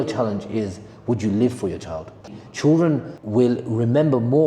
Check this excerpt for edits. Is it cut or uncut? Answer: cut